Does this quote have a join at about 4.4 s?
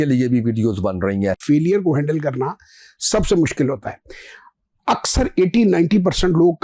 no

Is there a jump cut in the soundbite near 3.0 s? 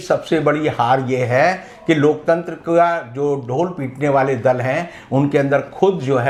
no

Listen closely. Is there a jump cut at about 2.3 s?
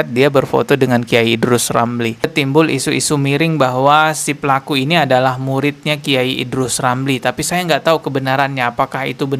yes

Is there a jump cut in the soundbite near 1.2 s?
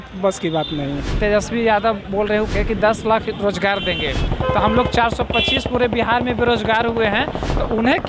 yes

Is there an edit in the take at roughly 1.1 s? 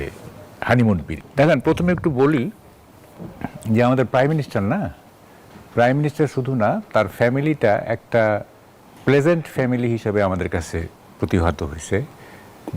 yes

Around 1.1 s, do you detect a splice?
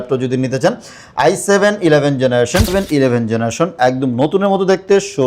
no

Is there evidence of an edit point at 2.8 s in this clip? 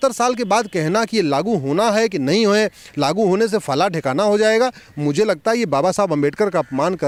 no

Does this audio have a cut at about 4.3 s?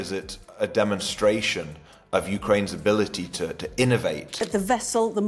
yes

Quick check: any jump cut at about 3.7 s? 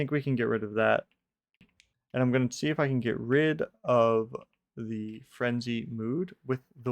no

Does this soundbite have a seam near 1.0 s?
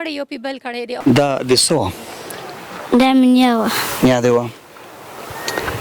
yes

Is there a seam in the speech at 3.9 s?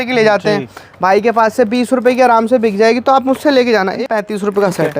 yes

